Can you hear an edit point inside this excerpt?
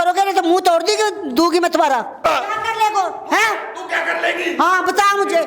yes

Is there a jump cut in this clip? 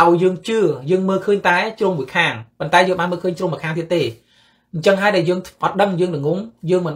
no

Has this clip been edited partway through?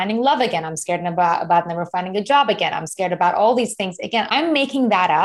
yes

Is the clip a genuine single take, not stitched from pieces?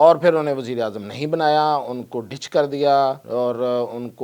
no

